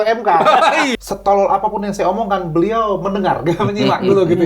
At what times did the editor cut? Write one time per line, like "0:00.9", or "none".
0:00.9